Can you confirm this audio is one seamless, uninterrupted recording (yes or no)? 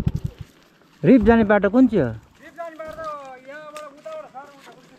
yes